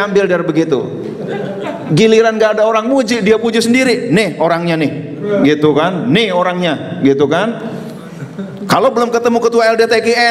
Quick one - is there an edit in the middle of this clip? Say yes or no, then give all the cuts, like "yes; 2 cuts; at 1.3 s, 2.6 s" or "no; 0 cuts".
no; 0 cuts